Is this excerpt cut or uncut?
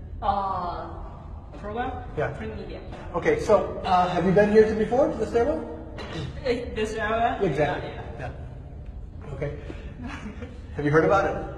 cut